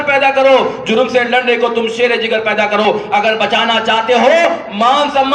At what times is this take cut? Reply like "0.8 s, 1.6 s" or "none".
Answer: none